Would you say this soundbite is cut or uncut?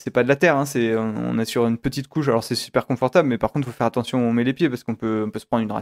uncut